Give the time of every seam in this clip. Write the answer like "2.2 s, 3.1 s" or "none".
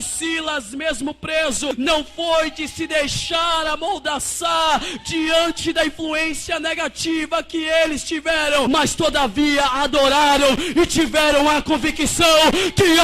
1.7 s, 8.7 s